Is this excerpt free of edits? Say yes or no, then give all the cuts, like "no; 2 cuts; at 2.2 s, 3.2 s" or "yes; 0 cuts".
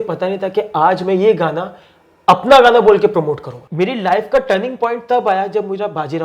no; 1 cut; at 3.5 s